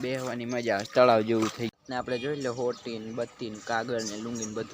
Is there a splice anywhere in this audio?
yes; 1 cut; at 1.7 s

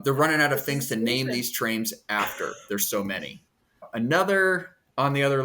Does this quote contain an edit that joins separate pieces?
yes; 1 cut; at 3.9 s

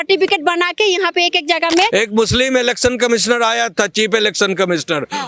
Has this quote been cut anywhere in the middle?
yes; 1 cut; at 1.9 s

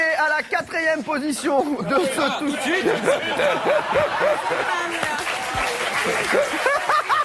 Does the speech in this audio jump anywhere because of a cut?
no; 0 cuts

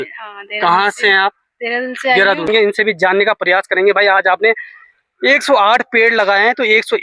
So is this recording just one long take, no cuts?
no; 1 cut; at 2.4 s

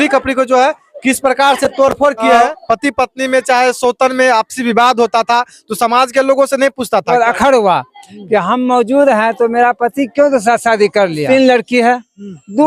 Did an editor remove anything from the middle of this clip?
yes; 3 cuts; at 2.3 s, 7.1 s, 11.2 s

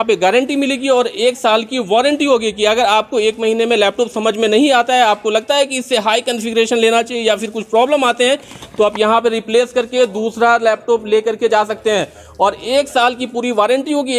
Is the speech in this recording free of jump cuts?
yes; 0 cuts

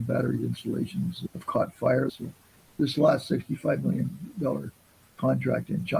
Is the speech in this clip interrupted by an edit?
yes; 1 cut; at 2.1 s

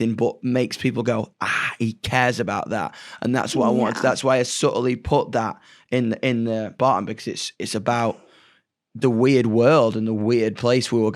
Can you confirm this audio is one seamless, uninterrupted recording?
no; 1 cut; at 6.8 s

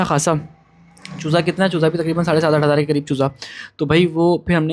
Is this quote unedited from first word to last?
yes; 0 cuts

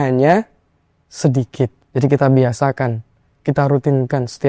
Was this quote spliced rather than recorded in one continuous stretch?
yes; 1 cut; at 1.8 s

